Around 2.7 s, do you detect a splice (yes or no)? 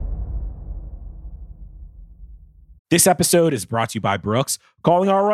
yes